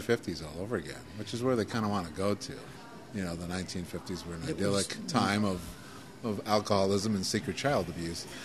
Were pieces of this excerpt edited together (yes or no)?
yes